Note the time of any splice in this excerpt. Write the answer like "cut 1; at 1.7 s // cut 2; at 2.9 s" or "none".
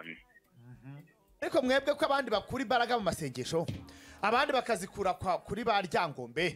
cut 1; at 1.5 s

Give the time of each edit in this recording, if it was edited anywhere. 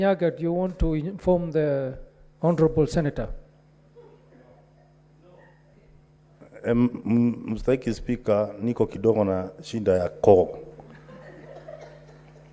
cut 1; at 5.8 s

